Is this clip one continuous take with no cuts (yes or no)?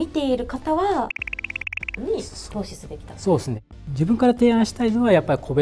no